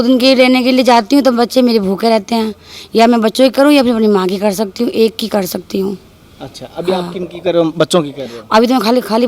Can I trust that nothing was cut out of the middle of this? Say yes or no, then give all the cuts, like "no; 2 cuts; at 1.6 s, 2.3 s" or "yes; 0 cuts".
yes; 0 cuts